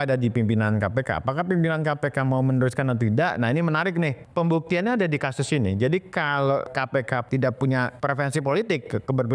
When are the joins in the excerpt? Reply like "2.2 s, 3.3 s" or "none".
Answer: 4.2 s, 6.8 s, 7.9 s